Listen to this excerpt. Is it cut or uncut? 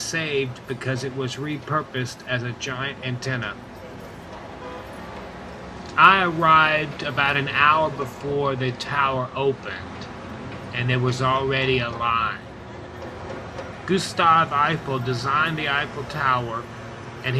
uncut